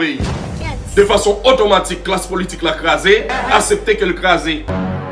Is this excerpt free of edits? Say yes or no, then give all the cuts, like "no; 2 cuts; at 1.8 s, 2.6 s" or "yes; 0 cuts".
yes; 0 cuts